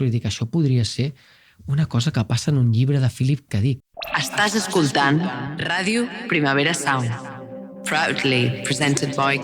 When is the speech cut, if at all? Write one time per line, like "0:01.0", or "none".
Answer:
0:03.9